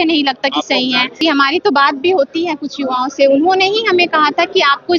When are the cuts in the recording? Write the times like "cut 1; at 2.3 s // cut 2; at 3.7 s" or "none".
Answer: none